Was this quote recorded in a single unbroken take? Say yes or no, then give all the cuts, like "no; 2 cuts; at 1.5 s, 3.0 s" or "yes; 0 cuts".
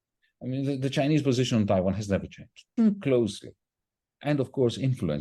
no; 1 cut; at 2.7 s